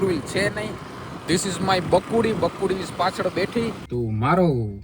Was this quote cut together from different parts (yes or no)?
yes